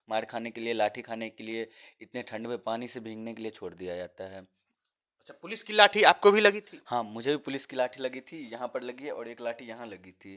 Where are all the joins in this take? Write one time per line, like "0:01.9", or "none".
none